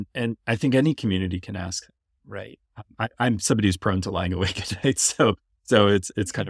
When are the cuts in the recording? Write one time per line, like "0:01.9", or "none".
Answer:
none